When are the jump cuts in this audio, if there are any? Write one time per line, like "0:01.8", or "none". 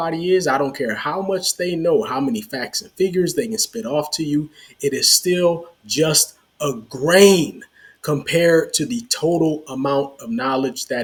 none